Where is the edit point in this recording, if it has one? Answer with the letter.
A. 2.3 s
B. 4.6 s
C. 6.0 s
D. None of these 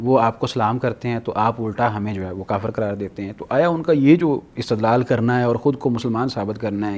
D